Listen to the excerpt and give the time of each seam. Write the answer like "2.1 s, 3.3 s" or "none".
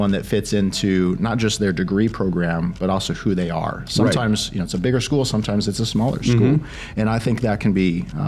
none